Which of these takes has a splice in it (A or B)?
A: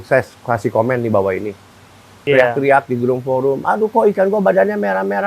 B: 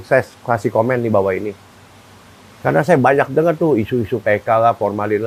A